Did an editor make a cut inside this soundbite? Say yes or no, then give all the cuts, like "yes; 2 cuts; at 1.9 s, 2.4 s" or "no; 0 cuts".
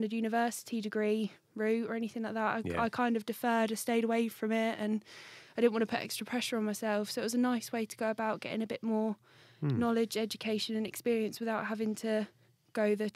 no; 0 cuts